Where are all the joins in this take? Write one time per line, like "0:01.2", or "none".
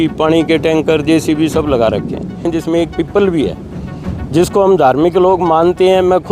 0:02.5

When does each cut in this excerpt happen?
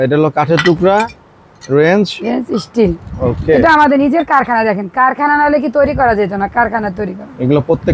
none

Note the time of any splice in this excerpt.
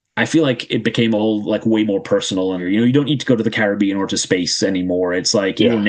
0:02.6

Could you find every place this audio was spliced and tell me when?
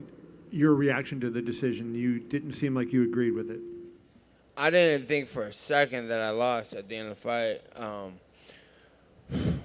none

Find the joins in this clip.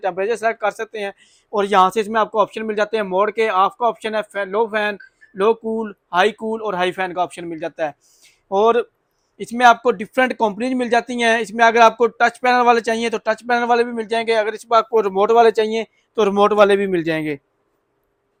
none

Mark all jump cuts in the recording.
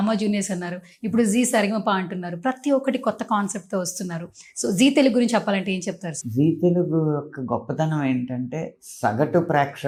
none

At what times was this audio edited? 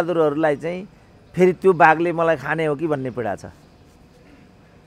none

